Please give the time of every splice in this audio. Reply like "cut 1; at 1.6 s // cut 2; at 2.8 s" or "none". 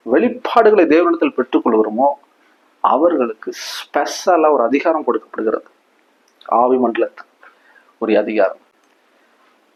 none